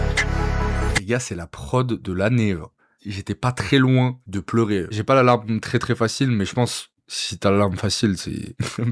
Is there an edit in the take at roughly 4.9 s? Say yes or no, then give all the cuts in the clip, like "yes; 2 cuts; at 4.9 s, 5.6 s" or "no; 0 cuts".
yes; 2 cuts; at 0.9 s, 4.9 s